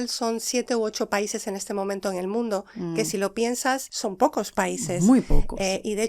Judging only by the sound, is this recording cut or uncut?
cut